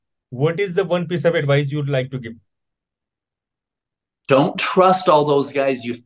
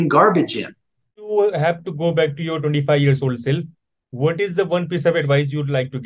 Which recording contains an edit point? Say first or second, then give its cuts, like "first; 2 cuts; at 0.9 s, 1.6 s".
second; 1 cut; at 1.3 s